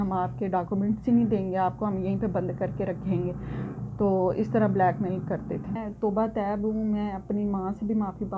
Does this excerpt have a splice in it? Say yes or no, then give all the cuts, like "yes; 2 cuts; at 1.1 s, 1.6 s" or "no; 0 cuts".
yes; 1 cut; at 5.8 s